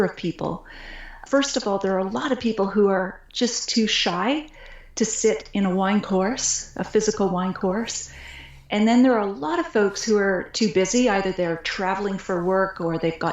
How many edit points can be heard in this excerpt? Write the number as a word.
one